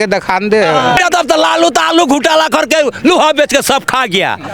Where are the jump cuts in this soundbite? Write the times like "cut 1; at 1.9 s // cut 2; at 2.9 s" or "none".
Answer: cut 1; at 1.0 s

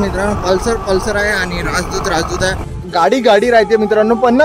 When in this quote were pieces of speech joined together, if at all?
cut 1; at 2.7 s

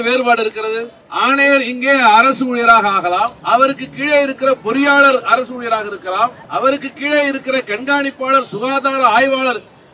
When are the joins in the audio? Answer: cut 1; at 1.0 s // cut 2; at 3.4 s // cut 3; at 6.4 s

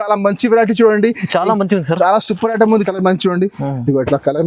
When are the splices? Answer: cut 1; at 2.8 s

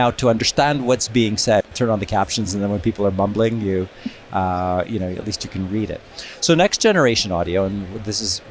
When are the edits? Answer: cut 1; at 1.7 s

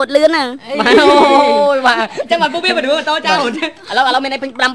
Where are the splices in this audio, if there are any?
none

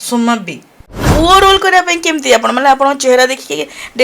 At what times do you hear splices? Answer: cut 1; at 1.0 s

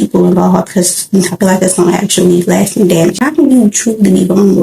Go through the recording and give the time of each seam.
cut 1; at 3.2 s

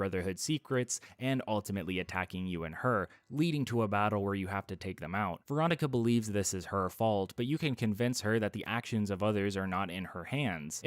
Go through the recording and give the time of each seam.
cut 1; at 4.5 s

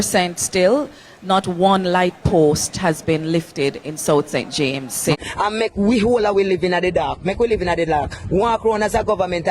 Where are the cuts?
cut 1; at 5.1 s

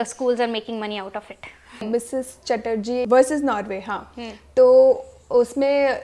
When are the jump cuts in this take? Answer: cut 1; at 1.8 s // cut 2; at 3.0 s

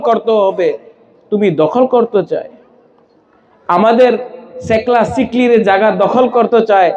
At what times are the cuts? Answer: none

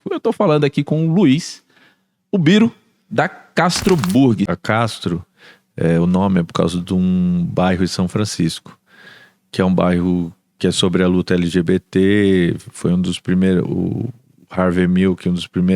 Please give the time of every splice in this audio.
cut 1; at 4.5 s

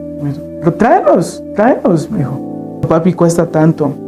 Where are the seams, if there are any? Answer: cut 1; at 2.9 s

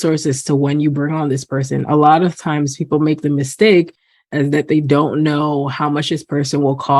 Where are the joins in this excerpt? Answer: none

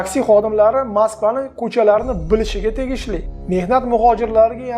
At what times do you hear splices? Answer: cut 1; at 3.2 s

